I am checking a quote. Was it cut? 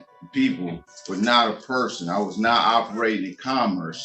no; 0 cuts

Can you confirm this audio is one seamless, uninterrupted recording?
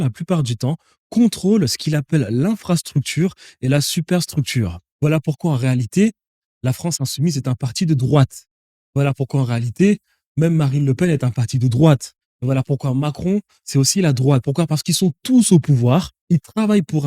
no; 2 cuts; at 4.8 s, 16.1 s

